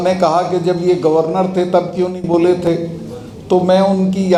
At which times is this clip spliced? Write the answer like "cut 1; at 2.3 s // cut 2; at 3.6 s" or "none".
none